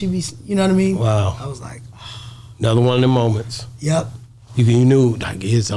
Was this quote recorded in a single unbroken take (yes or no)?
yes